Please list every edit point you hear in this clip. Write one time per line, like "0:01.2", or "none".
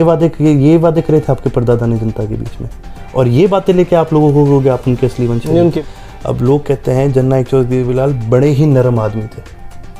0:05.8